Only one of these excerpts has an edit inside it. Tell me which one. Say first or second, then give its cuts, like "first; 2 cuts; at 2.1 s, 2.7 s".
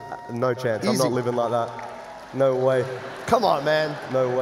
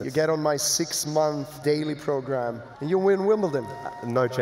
second; 2 cuts; at 1.6 s, 2.7 s